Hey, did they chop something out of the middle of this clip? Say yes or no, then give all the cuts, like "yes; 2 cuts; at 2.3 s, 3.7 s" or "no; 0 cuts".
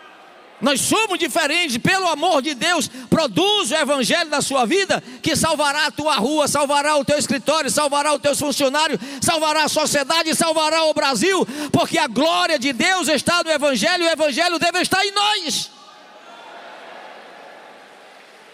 no; 0 cuts